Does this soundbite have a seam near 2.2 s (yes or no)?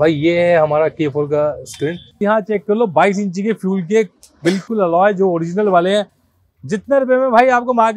yes